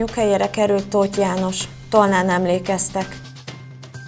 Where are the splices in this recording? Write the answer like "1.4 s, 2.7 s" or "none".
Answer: 3.1 s